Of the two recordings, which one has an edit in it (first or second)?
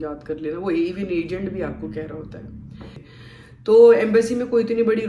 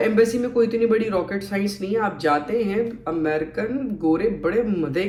first